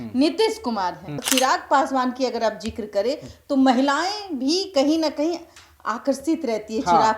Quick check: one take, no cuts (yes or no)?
no